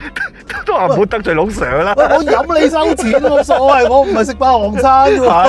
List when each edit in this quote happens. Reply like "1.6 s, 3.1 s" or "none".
none